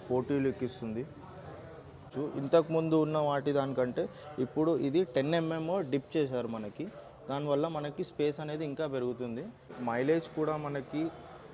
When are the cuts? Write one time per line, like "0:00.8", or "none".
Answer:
0:02.1
0:09.8